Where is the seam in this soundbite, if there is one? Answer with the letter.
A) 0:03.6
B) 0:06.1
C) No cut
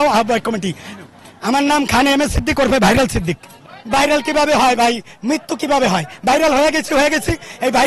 C